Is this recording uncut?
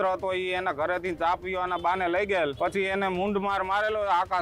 no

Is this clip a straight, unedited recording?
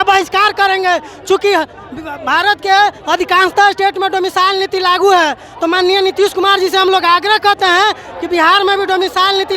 yes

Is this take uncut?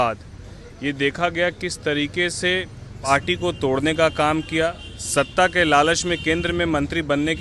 no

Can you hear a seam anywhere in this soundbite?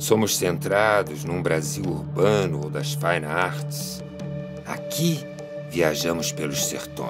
yes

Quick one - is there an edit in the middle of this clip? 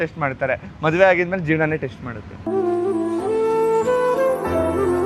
no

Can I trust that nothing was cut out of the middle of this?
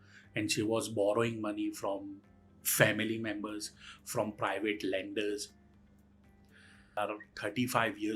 no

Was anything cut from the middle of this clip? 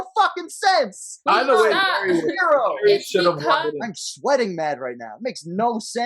yes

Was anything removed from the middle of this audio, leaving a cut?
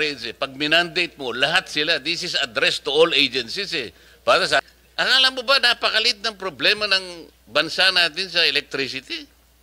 yes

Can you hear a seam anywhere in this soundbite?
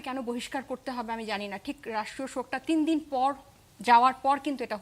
no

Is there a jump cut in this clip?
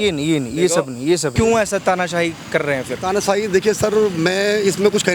yes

